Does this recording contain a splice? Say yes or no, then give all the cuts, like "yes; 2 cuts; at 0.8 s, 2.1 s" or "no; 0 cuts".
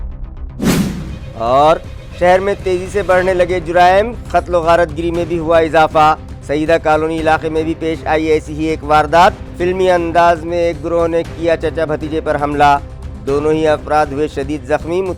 no; 0 cuts